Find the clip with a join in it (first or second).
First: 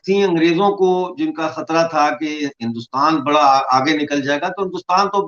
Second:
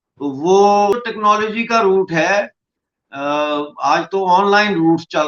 second